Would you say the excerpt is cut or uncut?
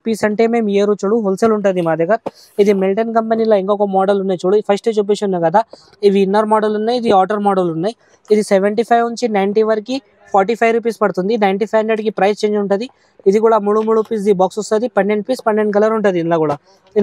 uncut